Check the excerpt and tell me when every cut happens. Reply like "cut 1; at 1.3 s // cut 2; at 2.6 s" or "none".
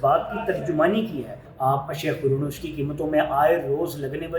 cut 1; at 1.4 s